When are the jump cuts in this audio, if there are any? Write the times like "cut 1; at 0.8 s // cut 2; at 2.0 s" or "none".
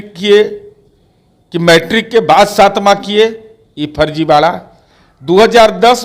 none